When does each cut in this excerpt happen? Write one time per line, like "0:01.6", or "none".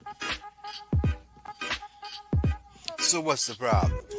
0:01.1

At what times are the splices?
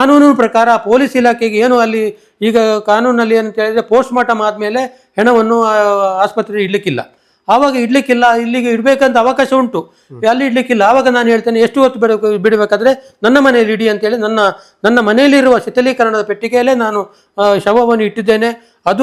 none

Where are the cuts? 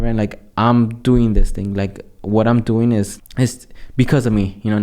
0:03.1

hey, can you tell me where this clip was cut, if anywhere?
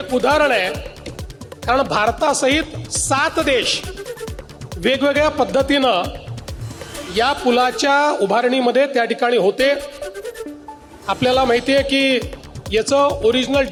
none

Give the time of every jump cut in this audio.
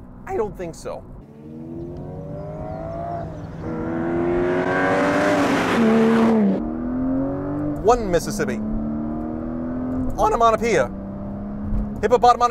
0:01.2
0:06.6

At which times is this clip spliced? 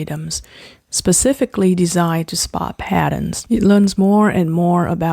0:03.4

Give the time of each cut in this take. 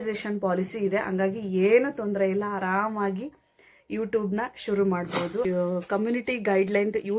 0:05.4

